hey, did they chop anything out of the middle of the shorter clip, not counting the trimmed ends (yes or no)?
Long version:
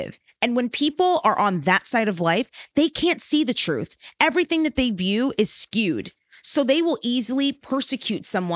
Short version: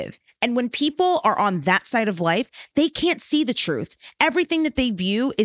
no